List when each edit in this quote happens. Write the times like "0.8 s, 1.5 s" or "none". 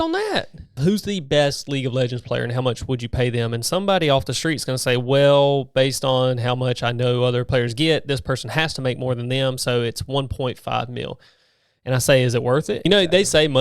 0.8 s, 7.5 s, 12.8 s